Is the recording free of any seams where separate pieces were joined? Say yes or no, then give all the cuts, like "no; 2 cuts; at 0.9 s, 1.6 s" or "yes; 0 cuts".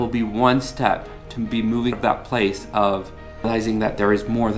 no; 2 cuts; at 1.9 s, 3.5 s